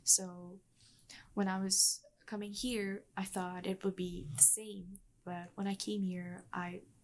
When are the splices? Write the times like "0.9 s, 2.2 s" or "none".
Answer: none